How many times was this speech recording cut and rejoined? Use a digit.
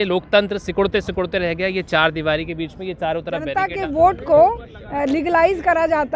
1